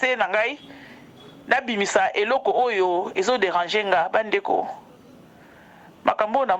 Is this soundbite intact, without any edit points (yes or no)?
yes